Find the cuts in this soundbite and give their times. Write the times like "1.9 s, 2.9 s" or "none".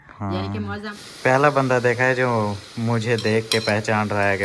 0.9 s